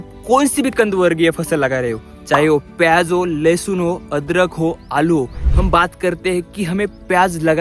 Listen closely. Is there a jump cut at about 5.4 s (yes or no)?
yes